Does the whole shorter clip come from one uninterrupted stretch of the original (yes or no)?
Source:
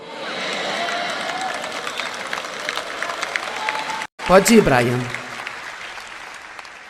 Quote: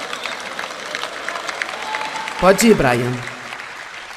no